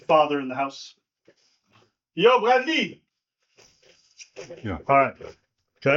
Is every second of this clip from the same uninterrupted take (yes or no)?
yes